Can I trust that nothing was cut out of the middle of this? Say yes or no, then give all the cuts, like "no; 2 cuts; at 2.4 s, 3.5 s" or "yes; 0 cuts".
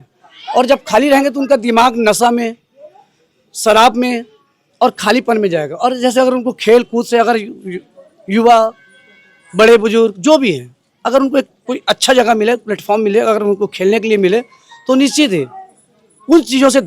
yes; 0 cuts